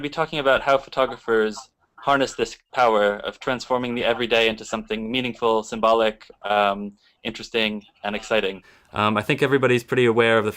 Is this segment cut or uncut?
cut